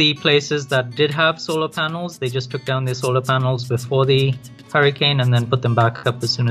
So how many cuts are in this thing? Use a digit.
0